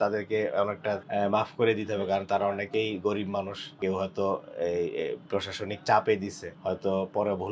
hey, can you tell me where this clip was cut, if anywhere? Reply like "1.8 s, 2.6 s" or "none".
1.0 s, 3.7 s, 6.4 s

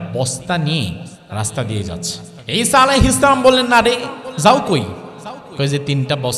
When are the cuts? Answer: 1.1 s, 2.3 s

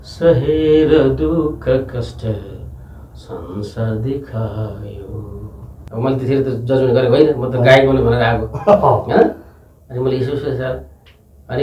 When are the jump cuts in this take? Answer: 5.9 s

